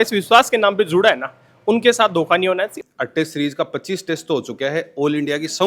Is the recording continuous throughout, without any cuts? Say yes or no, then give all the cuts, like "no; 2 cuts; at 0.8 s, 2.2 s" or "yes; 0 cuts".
no; 1 cut; at 2.8 s